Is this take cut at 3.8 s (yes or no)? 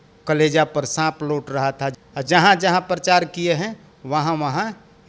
no